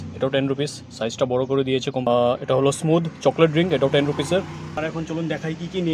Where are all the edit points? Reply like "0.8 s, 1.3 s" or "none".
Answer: 2.1 s, 4.8 s